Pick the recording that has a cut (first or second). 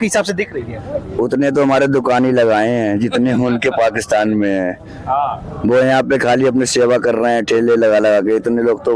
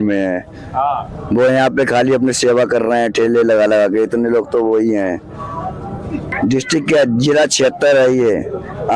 second